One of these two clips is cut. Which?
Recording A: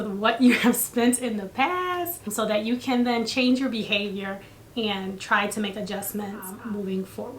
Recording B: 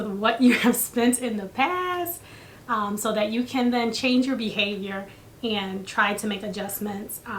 A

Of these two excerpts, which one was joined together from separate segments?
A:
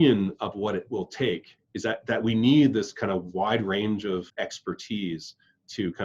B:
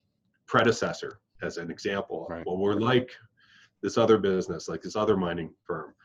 A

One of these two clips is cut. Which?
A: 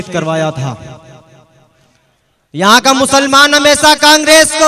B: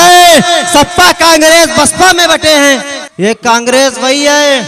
B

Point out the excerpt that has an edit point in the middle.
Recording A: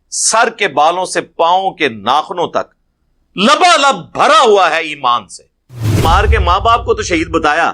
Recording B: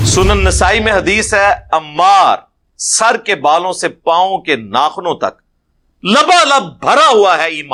A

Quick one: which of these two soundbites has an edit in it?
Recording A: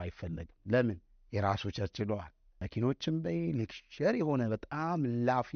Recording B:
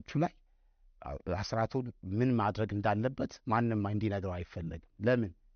A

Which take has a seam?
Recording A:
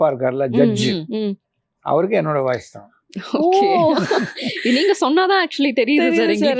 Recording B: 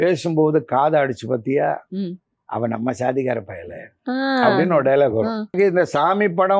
B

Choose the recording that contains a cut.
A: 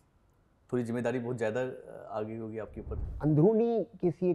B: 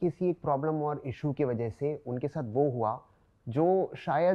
A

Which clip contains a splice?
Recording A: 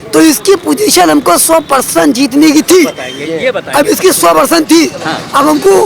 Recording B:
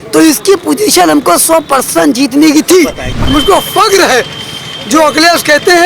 B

